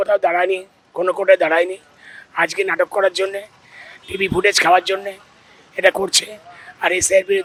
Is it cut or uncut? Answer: uncut